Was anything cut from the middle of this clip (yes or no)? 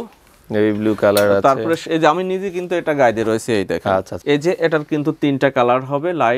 yes